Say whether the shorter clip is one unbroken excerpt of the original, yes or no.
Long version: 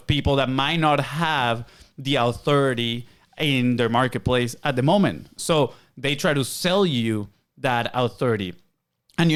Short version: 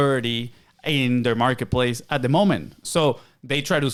yes